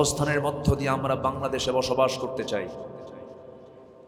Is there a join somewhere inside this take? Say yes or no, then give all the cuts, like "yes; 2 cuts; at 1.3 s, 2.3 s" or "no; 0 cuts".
no; 0 cuts